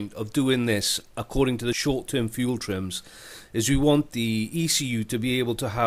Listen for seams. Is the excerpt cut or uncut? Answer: cut